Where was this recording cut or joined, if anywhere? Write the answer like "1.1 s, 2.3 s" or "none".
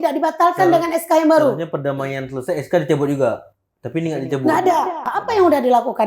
5.1 s

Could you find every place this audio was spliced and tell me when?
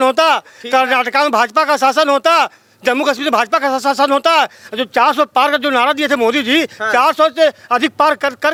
none

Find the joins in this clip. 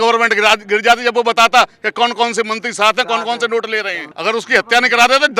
4.0 s

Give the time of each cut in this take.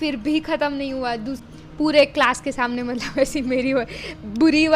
1.4 s

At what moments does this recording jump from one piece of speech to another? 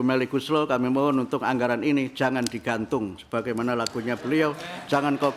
none

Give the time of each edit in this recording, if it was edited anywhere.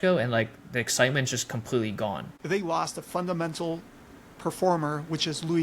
2.3 s

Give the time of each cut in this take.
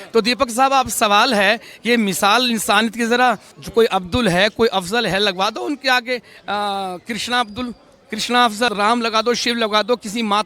3.5 s, 8.7 s

